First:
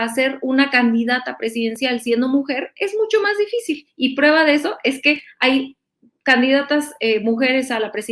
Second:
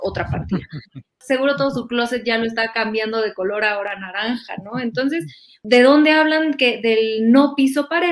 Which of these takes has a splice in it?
second; 2 cuts; at 1.2 s, 5.5 s

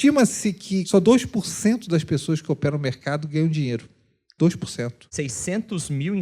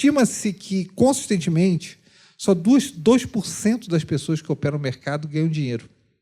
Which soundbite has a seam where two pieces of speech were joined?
first; 2 cuts; at 0.9 s, 5.0 s

